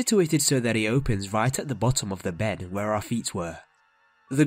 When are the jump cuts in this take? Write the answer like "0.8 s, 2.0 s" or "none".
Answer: 2.5 s